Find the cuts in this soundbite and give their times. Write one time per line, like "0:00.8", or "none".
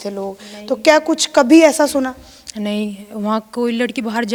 none